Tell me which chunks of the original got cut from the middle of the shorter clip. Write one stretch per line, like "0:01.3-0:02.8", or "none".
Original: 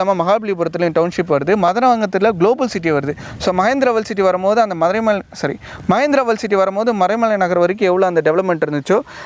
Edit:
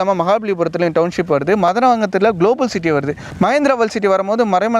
0:03.2-0:05.7